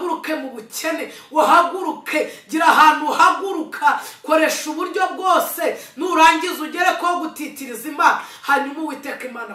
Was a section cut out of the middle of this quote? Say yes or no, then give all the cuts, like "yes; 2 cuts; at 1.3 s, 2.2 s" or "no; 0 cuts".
no; 0 cuts